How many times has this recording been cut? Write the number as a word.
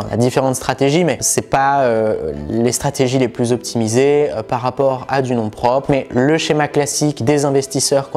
three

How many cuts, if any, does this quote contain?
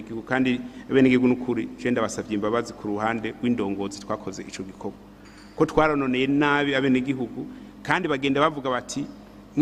one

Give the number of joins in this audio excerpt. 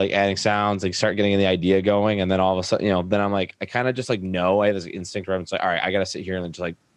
zero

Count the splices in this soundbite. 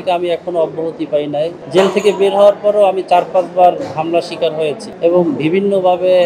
two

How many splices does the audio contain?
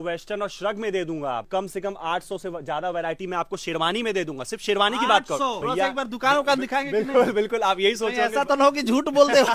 two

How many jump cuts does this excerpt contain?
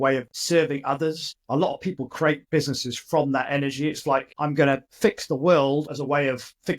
four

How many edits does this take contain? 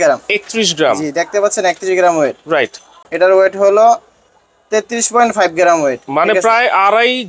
one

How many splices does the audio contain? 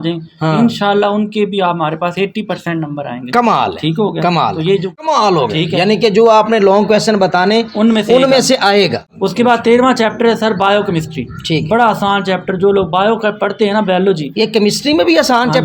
two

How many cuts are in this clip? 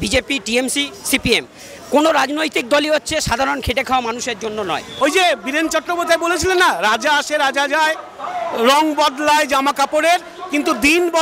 one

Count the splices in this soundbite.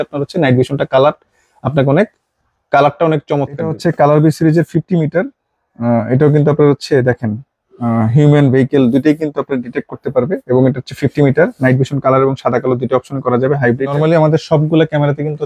two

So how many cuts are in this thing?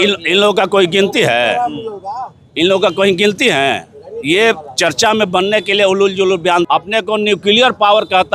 one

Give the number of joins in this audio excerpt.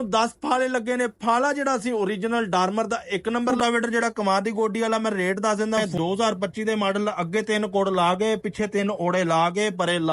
two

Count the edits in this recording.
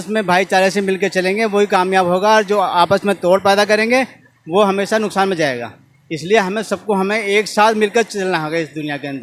zero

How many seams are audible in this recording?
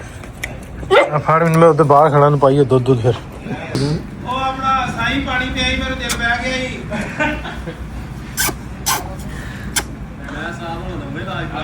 one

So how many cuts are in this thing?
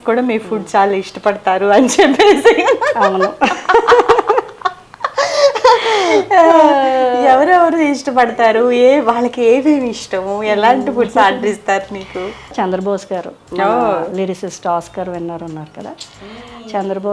one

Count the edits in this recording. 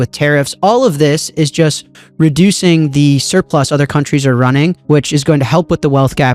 one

